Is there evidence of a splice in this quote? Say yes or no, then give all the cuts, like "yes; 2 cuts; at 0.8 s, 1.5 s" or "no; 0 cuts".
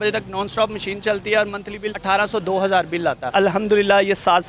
yes; 2 cuts; at 1.9 s, 3.3 s